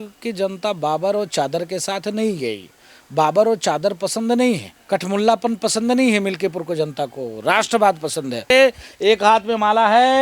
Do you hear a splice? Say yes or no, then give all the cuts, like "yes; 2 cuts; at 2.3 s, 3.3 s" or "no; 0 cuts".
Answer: yes; 2 cuts; at 4.7 s, 8.4 s